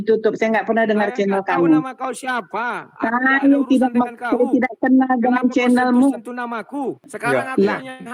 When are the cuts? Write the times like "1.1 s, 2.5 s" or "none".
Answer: 7.1 s